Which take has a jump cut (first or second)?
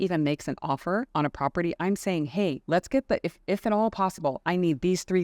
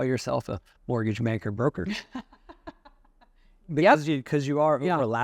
first